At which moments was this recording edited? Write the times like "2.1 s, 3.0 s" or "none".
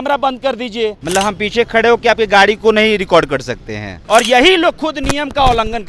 1.0 s, 3.9 s